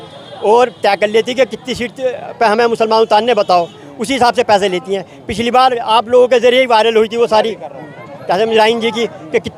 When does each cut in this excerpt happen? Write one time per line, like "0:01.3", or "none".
none